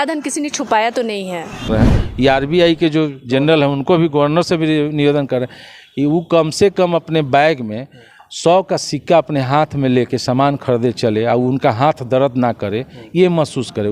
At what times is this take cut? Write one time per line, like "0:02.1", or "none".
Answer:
0:01.6